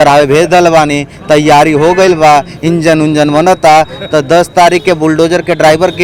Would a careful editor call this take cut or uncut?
uncut